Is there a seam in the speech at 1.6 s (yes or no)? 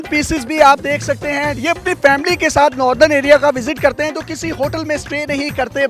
yes